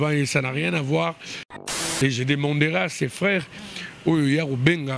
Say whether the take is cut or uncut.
cut